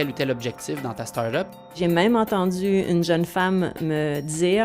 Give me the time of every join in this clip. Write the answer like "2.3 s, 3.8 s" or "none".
1.8 s